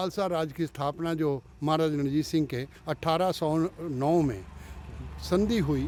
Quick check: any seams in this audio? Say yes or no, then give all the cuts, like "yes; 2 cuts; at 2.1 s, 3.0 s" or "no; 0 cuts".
no; 0 cuts